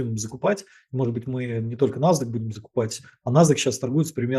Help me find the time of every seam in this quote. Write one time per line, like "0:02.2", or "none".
none